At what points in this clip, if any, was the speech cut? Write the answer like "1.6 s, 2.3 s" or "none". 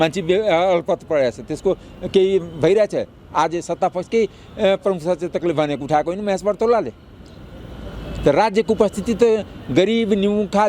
none